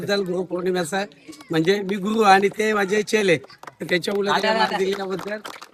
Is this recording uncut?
yes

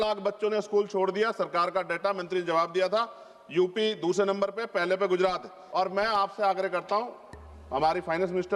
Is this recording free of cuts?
no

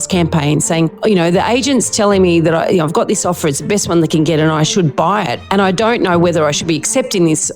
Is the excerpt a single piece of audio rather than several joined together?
no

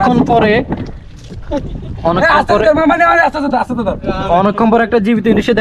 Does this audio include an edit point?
no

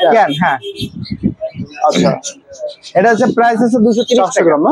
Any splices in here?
no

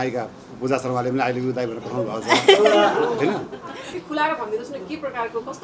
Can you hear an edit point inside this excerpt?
yes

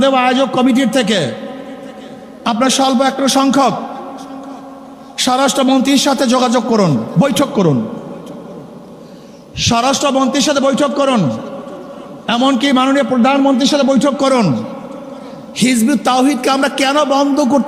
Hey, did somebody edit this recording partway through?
no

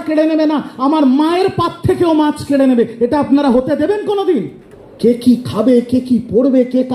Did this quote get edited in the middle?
no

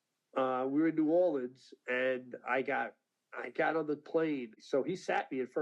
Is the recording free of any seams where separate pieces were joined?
no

